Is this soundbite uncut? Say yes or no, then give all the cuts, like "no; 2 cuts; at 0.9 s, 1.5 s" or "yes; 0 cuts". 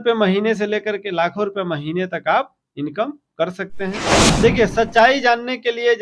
no; 1 cut; at 4.2 s